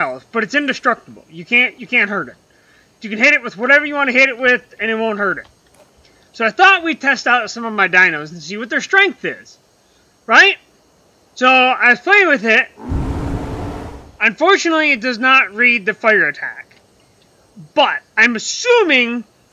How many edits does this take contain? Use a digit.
1